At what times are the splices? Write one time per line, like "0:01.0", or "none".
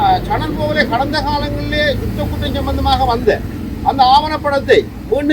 none